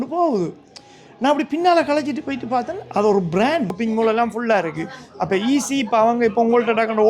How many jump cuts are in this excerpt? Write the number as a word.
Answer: one